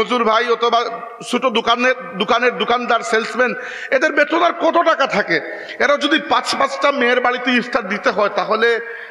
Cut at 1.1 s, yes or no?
no